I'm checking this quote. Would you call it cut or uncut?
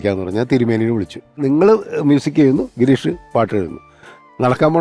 cut